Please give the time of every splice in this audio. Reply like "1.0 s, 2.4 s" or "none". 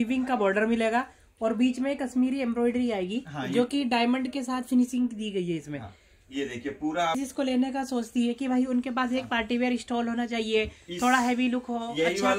7.2 s